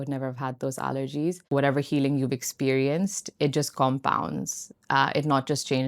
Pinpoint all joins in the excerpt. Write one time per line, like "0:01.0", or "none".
0:01.5